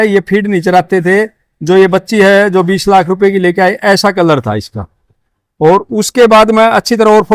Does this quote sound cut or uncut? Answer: uncut